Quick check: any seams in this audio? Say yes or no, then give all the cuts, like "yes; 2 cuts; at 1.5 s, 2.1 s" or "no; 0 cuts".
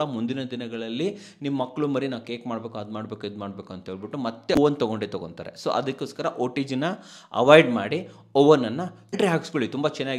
yes; 1 cut; at 9.1 s